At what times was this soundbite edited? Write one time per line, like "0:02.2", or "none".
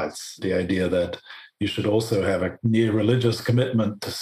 0:02.6